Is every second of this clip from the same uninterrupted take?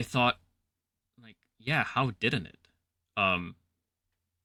yes; 0 cuts

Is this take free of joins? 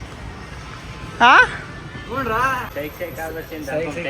no; 1 cut; at 2.7 s

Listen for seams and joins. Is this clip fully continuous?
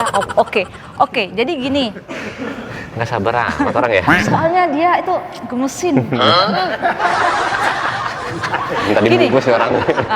yes; 0 cuts

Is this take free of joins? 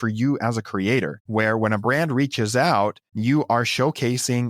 no; 2 cuts; at 1.2 s, 3.1 s

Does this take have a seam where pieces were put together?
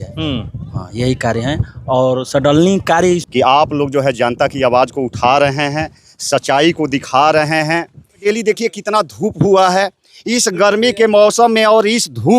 yes; 2 cuts; at 3.3 s, 8.2 s

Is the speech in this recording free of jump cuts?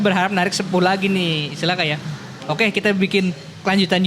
yes; 0 cuts

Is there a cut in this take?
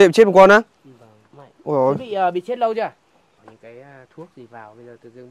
yes; 1 cut; at 3.5 s

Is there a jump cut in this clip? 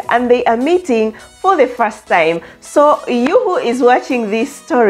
no; 0 cuts

